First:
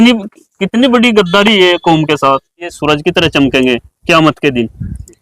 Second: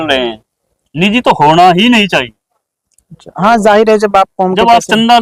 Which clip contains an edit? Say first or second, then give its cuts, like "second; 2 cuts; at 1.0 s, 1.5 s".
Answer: first; 1 cut; at 2.7 s